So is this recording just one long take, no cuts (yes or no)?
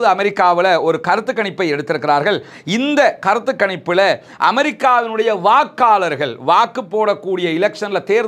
yes